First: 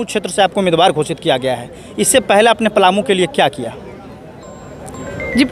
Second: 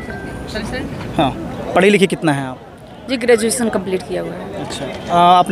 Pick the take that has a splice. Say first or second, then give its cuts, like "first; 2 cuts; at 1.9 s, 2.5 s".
second; 1 cut; at 1.5 s